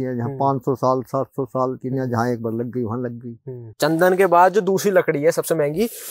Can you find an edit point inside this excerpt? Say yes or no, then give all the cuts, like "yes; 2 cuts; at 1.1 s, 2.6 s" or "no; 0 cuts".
yes; 1 cut; at 3.7 s